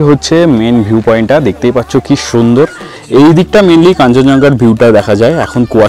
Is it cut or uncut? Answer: uncut